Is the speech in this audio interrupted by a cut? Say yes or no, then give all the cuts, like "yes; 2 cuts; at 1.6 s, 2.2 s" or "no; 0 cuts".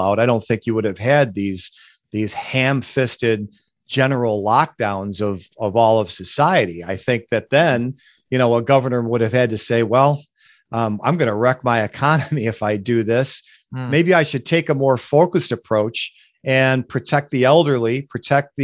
no; 0 cuts